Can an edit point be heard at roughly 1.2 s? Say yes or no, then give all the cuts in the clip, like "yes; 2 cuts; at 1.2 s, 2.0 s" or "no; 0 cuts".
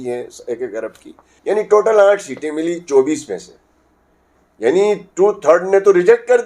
yes; 1 cut; at 1.2 s